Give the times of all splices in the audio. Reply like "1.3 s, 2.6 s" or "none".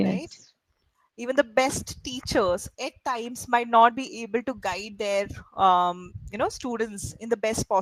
none